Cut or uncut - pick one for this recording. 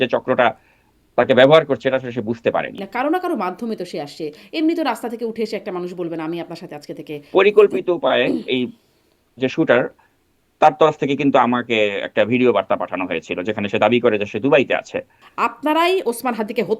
cut